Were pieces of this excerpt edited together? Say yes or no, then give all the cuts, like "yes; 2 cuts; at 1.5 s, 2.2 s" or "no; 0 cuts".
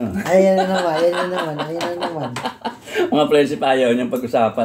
no; 0 cuts